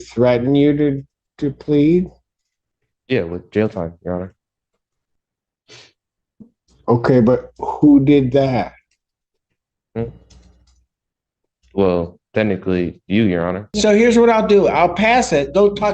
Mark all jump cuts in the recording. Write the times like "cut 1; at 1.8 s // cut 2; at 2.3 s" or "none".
cut 1; at 13.7 s

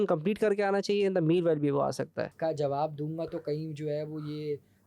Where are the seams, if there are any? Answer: cut 1; at 2.3 s

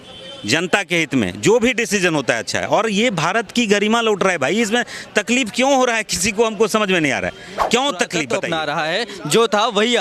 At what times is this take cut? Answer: cut 1; at 8.5 s

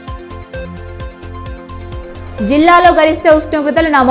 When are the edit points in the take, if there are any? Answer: cut 1; at 1.6 s

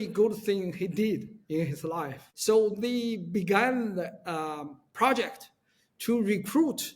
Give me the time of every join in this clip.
cut 1; at 2.2 s

